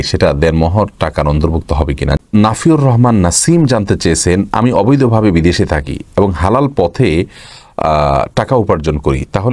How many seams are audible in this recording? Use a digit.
1